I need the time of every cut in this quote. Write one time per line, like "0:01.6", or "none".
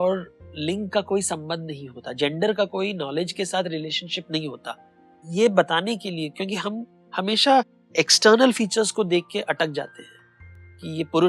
none